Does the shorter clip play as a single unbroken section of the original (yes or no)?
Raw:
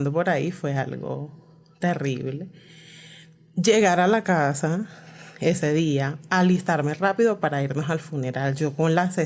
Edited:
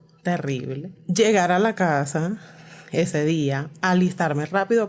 no